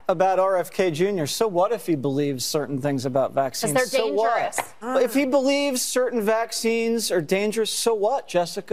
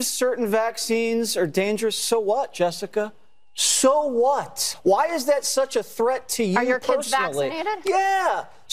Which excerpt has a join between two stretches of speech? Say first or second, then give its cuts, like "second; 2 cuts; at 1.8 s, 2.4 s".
second; 1 cut; at 4.6 s